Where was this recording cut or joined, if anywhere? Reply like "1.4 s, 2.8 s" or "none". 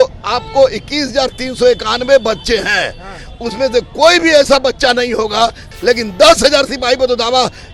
5.6 s